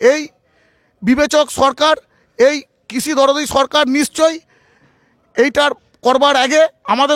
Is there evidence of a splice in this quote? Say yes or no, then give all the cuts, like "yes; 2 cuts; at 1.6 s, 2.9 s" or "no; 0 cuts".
no; 0 cuts